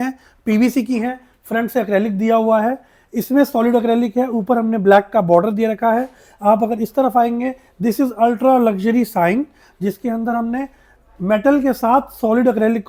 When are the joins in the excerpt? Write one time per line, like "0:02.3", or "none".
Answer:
none